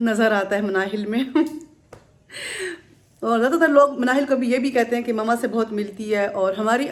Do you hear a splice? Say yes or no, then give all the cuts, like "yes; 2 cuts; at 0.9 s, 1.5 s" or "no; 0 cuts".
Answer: no; 0 cuts